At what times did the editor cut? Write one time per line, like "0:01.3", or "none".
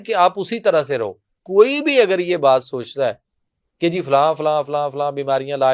0:01.4